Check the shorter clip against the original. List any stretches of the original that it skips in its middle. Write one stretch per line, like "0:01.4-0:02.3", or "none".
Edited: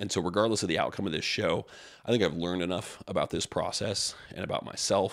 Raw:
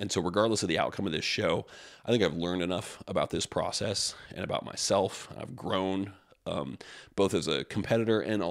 none